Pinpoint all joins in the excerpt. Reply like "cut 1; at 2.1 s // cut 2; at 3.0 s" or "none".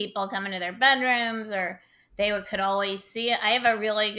none